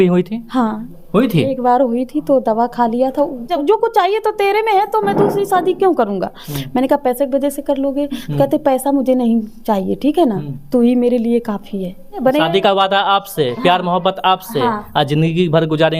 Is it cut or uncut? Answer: cut